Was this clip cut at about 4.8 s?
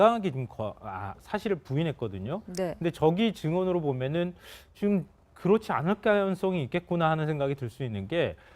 no; 1 cut; at 1.8 s

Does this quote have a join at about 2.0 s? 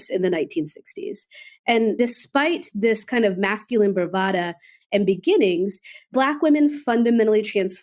yes; 2 cuts; at 2.0 s, 6.1 s

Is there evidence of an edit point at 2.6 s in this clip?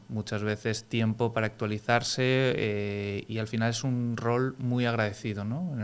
no; 0 cuts

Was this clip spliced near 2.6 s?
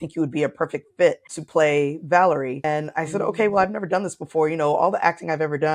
yes; 2 cuts; at 1.3 s, 2.6 s

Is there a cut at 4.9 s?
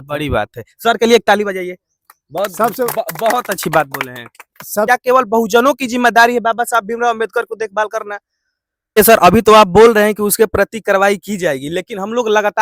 yes; 2 cuts; at 4.9 s, 9.0 s

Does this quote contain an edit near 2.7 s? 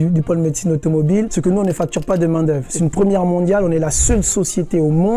yes; 2 cuts; at 1.3 s, 2.7 s

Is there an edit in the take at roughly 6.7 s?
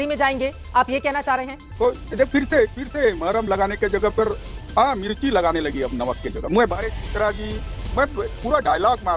yes; 2 cuts; at 1.7 s, 6.7 s

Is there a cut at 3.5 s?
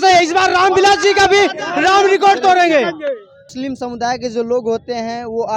yes; 1 cut; at 3.5 s

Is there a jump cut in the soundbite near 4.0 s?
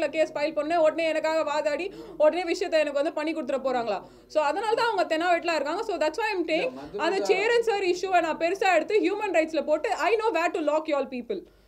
no; 0 cuts

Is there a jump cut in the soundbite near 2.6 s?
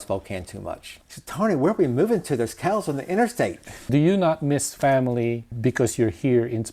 no; 3 cuts; at 0.9 s, 3.9 s, 5.5 s

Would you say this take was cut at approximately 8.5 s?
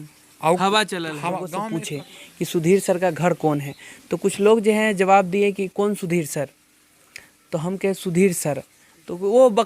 no; 1 cut; at 1.5 s

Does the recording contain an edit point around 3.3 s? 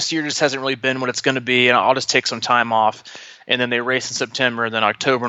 no; 0 cuts

